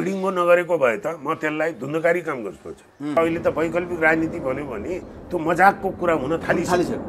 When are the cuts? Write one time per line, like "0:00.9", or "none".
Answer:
0:03.2